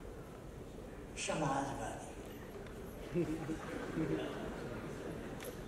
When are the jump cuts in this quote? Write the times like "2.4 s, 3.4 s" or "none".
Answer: none